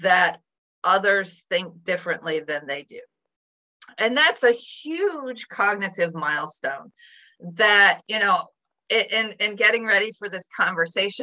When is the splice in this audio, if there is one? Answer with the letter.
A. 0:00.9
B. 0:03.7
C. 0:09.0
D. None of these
D